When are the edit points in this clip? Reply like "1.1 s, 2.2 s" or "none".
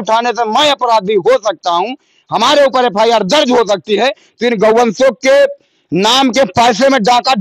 none